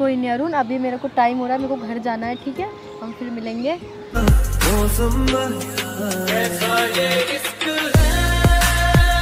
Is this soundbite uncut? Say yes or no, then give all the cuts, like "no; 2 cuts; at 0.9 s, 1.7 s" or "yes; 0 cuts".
no; 1 cut; at 4.2 s